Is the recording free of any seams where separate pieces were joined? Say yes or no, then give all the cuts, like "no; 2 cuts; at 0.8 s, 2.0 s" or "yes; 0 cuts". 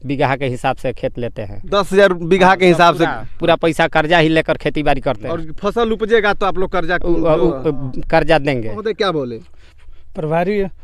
no; 2 cuts; at 5.3 s, 8.8 s